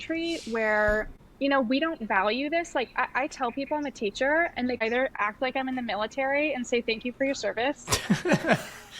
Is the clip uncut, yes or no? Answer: no